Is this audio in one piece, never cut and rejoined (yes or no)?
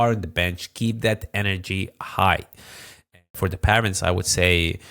no